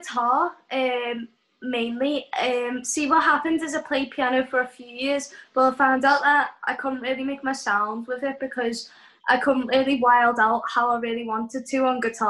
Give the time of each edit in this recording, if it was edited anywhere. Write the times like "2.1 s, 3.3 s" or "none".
none